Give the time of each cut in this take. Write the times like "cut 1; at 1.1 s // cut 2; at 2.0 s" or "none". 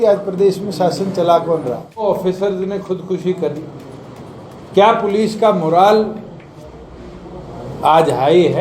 cut 1; at 2.1 s

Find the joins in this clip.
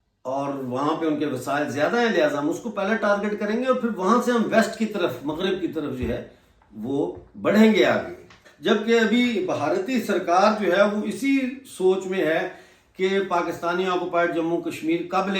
cut 1; at 8.4 s

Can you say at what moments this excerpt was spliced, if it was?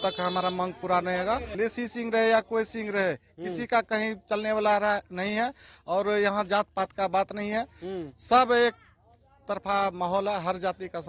cut 1; at 1.5 s

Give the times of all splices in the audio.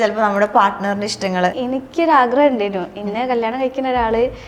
cut 1; at 1.6 s

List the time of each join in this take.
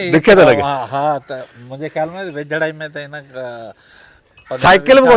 none

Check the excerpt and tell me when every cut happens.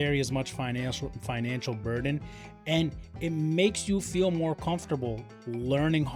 none

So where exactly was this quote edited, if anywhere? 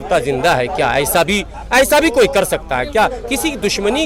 none

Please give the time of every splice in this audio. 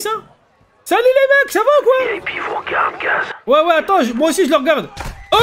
none

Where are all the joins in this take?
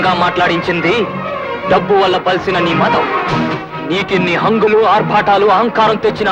none

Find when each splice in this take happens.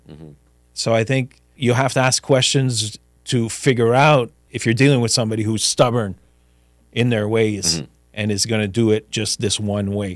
cut 1; at 1.4 s // cut 2; at 4.4 s

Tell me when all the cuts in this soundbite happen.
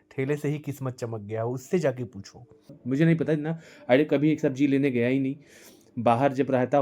cut 1; at 2.7 s

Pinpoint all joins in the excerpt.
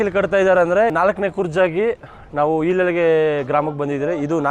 cut 1; at 0.9 s

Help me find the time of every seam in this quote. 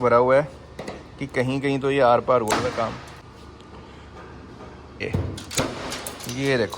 cut 1; at 3.2 s // cut 2; at 5.0 s

